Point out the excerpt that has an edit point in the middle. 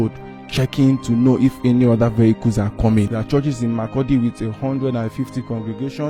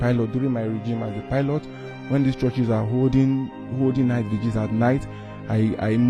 first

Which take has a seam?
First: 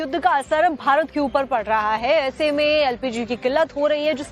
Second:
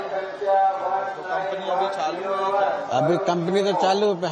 first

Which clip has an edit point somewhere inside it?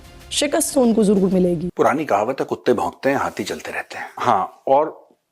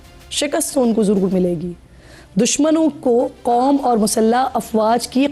first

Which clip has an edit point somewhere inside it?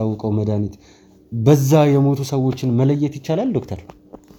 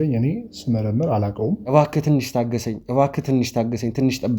second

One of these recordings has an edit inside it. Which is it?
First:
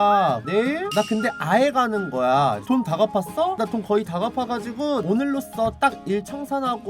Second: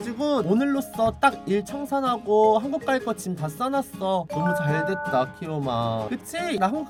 first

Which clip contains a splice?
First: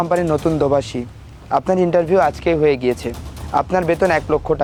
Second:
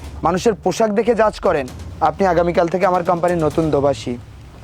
second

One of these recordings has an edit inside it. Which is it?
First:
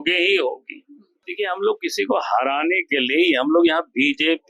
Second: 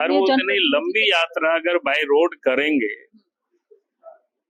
first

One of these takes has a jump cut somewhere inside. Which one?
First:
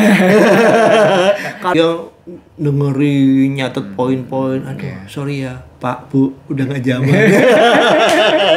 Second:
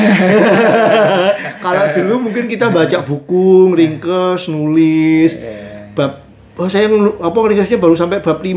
first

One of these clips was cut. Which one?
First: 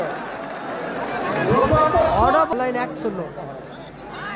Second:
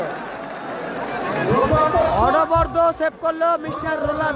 first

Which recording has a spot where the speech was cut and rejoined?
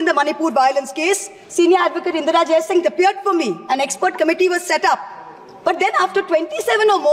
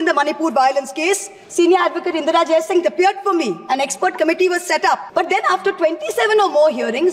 second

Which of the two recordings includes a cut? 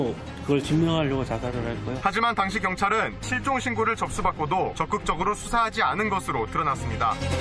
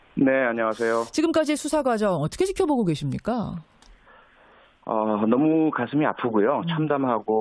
second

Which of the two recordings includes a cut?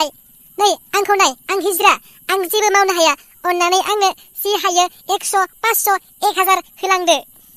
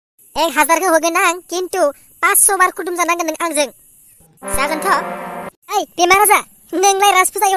second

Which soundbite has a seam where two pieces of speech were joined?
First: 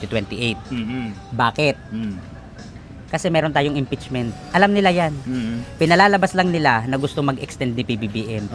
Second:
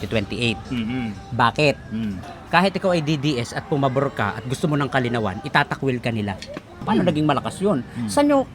second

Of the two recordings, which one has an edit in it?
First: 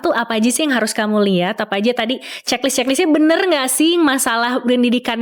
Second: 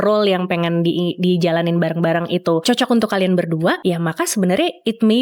second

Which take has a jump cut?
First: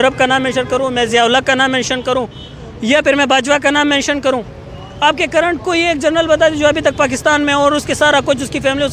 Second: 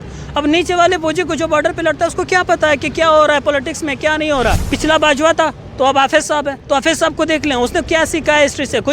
second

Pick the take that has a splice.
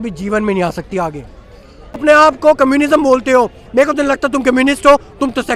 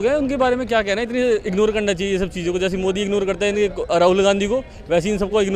first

